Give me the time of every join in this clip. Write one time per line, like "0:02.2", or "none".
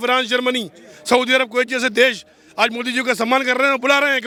none